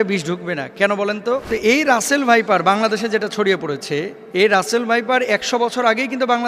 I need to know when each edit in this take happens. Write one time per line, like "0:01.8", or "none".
0:01.4
0:04.2